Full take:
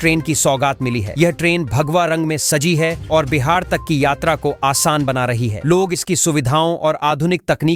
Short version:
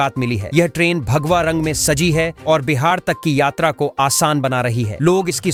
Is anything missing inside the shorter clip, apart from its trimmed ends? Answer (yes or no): no